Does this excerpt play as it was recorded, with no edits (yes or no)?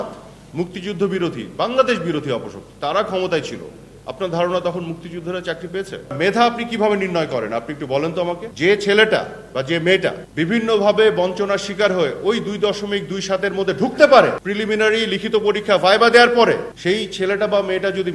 no